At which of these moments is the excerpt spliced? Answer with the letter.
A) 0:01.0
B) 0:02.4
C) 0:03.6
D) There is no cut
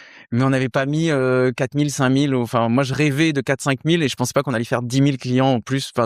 D